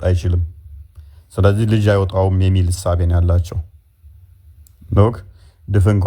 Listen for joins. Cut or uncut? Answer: uncut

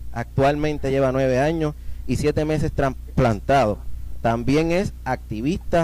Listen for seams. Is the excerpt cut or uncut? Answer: uncut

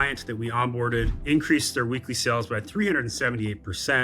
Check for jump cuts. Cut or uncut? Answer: cut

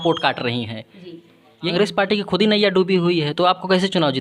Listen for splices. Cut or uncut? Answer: cut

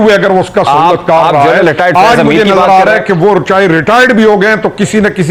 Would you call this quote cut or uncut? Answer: uncut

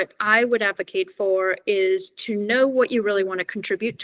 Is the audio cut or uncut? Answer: uncut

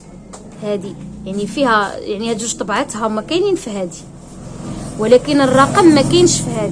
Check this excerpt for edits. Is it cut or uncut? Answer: uncut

